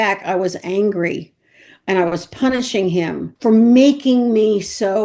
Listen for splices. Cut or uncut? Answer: uncut